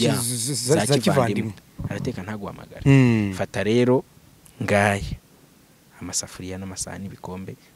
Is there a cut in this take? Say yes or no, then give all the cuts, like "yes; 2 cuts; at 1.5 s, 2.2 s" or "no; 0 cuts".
no; 0 cuts